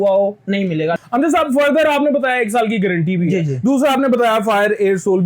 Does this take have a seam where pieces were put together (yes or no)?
yes